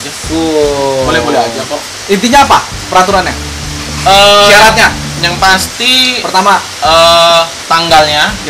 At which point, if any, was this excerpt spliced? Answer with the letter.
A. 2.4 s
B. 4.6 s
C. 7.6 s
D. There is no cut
C